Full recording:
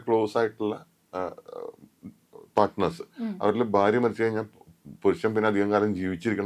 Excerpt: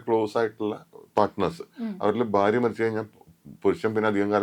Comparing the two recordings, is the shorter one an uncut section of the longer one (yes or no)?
no